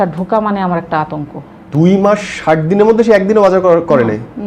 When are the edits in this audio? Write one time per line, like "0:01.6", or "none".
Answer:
0:01.7